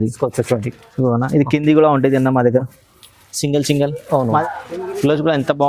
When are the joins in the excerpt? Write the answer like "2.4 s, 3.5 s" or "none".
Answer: 4.4 s